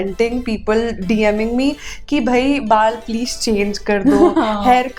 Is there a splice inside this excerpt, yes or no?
no